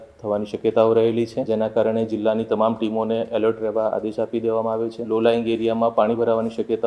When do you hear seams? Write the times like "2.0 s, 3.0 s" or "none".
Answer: 1.4 s, 5.0 s